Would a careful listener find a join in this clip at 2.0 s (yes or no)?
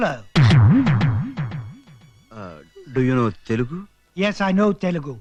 no